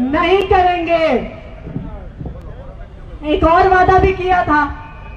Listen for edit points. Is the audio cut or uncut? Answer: uncut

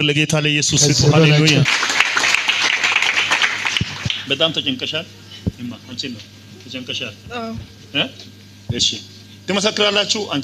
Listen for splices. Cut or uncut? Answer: cut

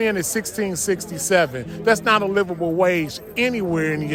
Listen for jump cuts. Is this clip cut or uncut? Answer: uncut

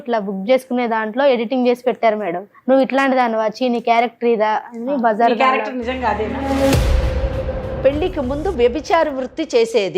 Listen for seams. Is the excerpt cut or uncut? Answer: cut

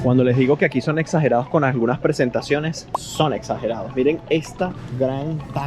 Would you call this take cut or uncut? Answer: uncut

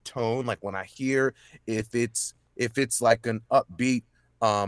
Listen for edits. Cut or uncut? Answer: uncut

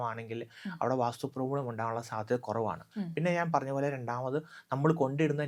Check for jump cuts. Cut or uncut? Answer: uncut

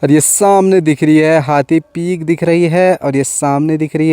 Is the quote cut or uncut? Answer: uncut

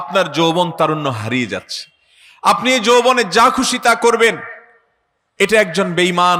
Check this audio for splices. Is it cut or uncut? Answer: uncut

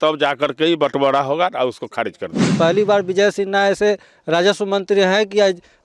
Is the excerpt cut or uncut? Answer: cut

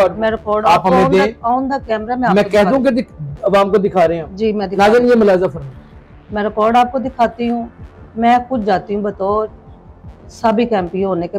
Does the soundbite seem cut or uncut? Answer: uncut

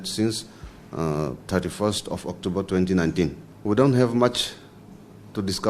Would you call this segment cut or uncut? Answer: cut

